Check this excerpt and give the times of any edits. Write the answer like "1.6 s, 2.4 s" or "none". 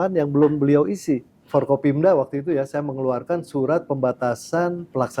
1.3 s